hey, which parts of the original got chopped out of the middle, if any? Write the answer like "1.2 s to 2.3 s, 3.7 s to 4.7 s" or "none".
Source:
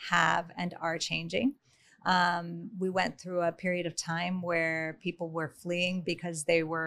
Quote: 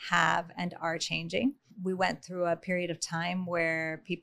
1.7 s to 2.6 s

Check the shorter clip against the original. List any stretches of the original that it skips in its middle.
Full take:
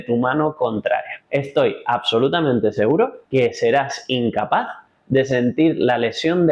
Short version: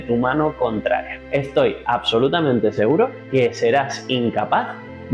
none

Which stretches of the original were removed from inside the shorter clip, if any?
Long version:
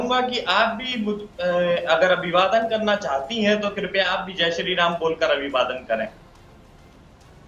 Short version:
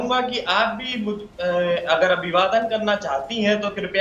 none

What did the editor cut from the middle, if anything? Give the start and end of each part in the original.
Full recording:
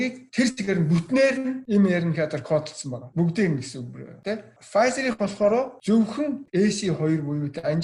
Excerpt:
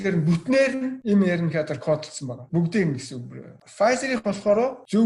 4.2 s to 4.5 s

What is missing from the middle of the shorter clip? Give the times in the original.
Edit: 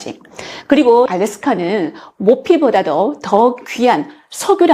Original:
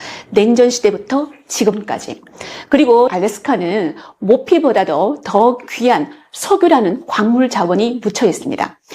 none

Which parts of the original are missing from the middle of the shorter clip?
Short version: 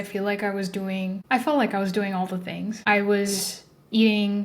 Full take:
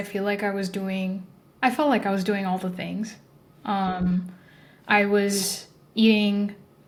1.2 s to 1.5 s, 3.1 s to 4.8 s

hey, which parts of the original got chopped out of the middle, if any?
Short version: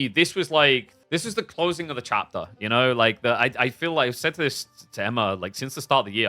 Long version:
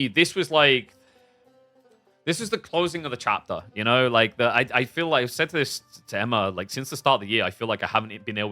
1.0 s to 2.1 s

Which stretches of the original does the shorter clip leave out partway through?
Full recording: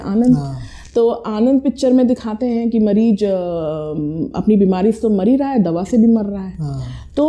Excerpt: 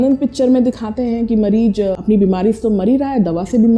3.4 s to 4.4 s

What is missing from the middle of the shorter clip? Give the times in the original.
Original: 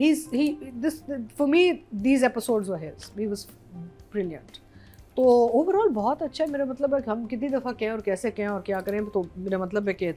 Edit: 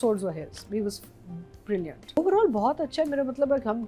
4.6 s to 5.6 s

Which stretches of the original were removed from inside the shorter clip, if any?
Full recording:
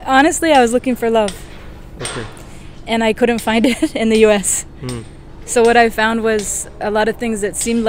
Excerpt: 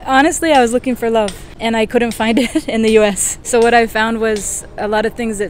1.4 s to 2.7 s, 4.6 s to 5.3 s

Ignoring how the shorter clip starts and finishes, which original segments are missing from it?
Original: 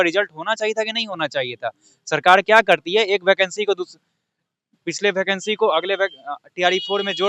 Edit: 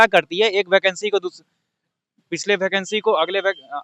none

